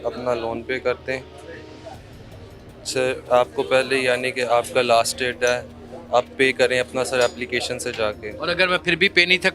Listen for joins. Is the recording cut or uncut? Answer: uncut